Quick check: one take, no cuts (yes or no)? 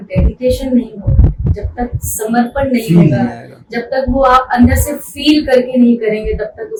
yes